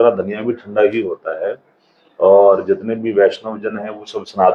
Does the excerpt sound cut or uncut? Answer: uncut